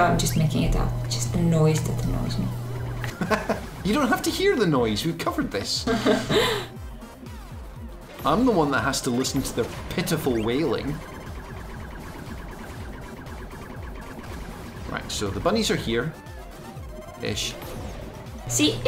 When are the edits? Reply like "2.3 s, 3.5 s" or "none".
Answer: none